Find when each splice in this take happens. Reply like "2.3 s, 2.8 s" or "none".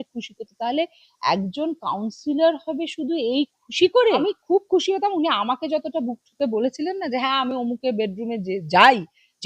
4.2 s